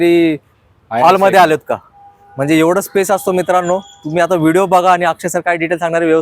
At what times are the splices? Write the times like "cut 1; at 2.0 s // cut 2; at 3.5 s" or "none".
none